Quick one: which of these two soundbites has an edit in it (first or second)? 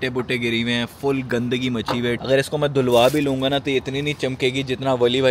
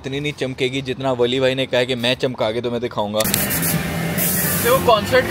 second